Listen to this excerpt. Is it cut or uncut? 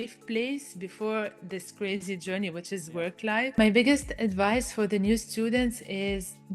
cut